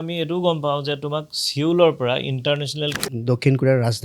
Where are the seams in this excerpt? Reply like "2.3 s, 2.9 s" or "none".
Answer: 3.0 s